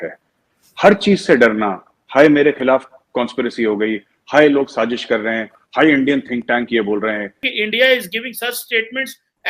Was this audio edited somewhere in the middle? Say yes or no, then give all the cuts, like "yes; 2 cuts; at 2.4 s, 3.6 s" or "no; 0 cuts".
yes; 2 cuts; at 5.6 s, 7.5 s